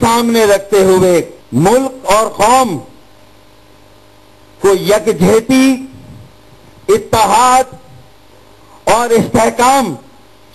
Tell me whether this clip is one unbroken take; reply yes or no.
no